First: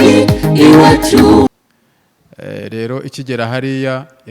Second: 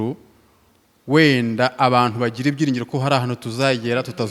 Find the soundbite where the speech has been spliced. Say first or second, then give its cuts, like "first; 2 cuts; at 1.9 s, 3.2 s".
first; 1 cut; at 1.5 s